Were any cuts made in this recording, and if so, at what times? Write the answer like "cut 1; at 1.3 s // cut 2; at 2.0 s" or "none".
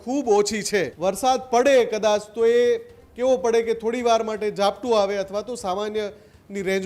cut 1; at 0.9 s

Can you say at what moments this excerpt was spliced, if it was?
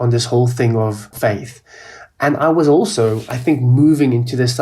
cut 1; at 1.1 s

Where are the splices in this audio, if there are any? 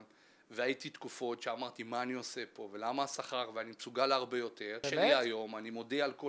cut 1; at 4.8 s

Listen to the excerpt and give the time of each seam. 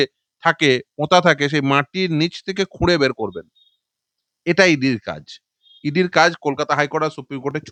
none

